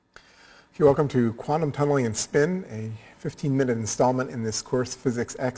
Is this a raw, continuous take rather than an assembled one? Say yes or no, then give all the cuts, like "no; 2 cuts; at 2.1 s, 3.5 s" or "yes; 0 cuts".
yes; 0 cuts